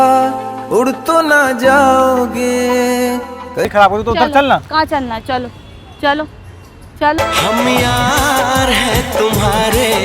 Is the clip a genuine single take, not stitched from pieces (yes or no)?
no